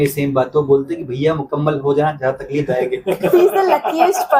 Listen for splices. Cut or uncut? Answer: uncut